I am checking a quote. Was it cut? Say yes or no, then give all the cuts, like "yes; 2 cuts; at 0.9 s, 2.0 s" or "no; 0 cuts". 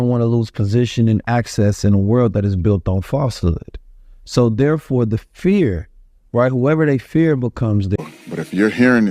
yes; 1 cut; at 8.0 s